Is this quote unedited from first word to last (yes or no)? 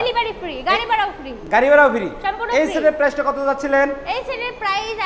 yes